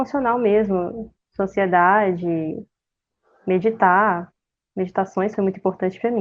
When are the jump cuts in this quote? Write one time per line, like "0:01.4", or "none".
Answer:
none